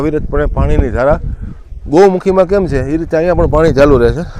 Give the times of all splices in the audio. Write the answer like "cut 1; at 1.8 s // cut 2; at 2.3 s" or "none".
none